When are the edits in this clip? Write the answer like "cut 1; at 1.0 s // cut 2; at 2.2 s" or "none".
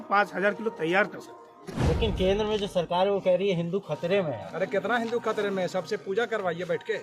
cut 1; at 1.7 s

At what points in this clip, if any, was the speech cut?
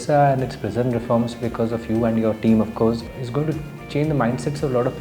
cut 1; at 3.1 s

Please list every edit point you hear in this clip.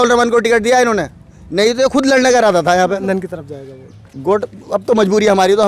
cut 1; at 3.0 s

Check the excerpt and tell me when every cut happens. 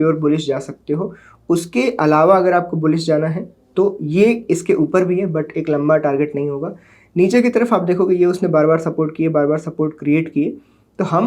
none

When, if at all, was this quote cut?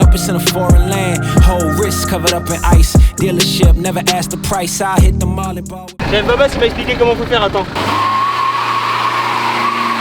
cut 1; at 5.9 s // cut 2; at 7.8 s

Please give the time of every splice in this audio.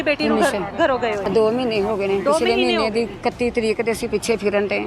cut 1; at 1.2 s

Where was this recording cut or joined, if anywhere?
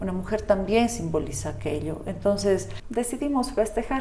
cut 1; at 2.8 s

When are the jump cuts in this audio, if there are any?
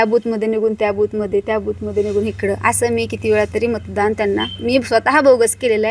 none

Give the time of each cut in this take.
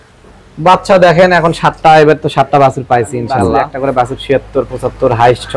cut 1; at 3.6 s

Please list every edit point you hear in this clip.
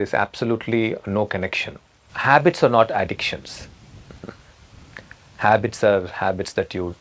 cut 1; at 2.1 s

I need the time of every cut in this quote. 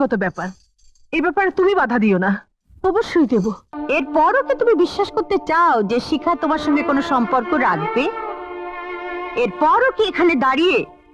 cut 1; at 3.7 s

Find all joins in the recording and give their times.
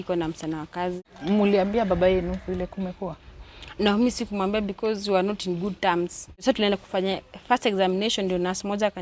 cut 1; at 1.0 s // cut 2; at 6.3 s

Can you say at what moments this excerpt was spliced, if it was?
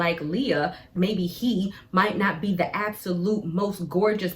cut 1; at 0.9 s

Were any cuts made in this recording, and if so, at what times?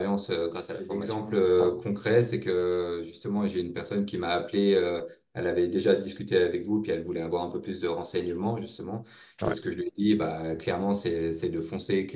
cut 1; at 1.1 s

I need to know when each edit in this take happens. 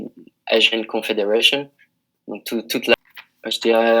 cut 1; at 2.9 s

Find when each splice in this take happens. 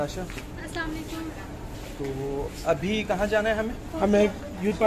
none

